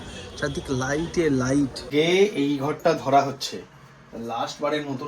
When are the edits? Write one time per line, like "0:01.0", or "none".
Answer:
0:01.8